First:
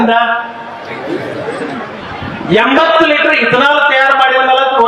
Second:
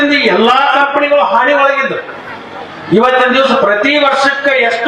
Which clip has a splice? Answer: first; 1 cut; at 2.0 s

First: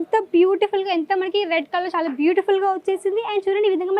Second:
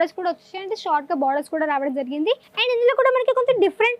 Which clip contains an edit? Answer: second; 1 cut; at 2.5 s

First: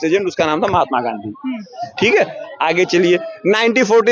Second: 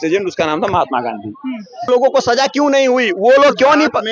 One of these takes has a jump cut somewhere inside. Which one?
second; 1 cut; at 1.9 s

